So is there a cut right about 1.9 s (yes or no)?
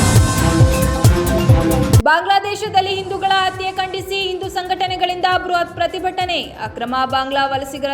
yes